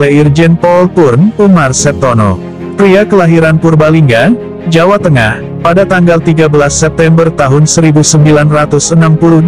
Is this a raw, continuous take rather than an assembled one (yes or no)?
yes